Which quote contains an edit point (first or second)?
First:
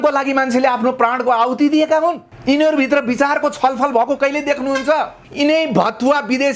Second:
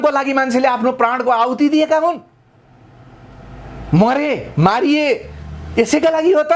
first